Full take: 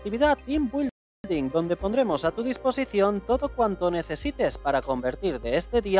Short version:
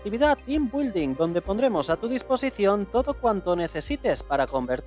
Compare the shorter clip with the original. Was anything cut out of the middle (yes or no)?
yes